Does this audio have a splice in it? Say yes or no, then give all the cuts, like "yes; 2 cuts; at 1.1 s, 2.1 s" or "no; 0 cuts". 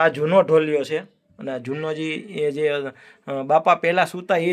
no; 0 cuts